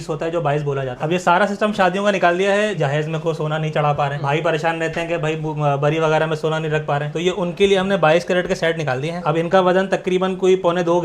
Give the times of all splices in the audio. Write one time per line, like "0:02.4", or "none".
0:01.0
0:02.8